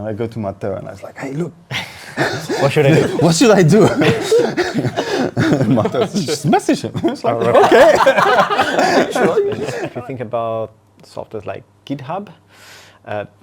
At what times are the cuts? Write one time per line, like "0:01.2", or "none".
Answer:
0:09.8